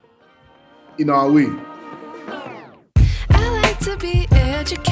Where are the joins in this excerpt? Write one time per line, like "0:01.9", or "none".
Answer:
0:02.2